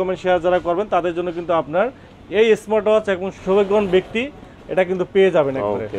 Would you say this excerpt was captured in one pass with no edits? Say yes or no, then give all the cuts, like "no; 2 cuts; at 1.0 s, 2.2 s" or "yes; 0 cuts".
yes; 0 cuts